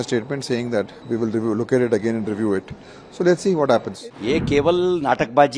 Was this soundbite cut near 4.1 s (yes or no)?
yes